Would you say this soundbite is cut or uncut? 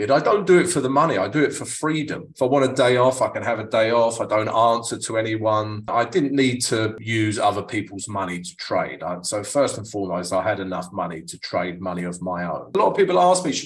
cut